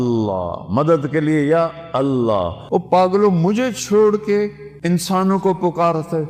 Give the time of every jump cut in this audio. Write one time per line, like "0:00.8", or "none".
0:02.6
0:04.7